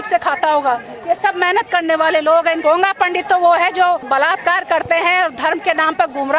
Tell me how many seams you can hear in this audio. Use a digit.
2